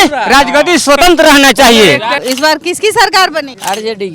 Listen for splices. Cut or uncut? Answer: cut